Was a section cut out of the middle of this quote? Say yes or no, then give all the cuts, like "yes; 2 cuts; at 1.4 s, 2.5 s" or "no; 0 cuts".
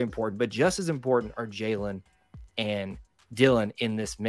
no; 0 cuts